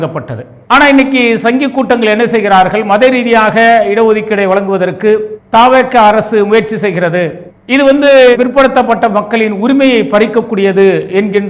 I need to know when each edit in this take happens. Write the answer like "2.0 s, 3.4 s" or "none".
none